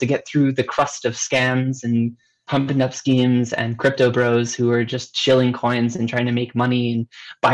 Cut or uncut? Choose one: uncut